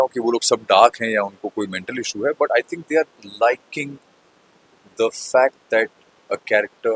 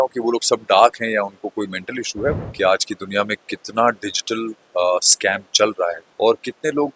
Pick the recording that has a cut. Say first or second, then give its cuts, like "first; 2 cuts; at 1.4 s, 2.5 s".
second; 2 cuts; at 2.4 s, 6.0 s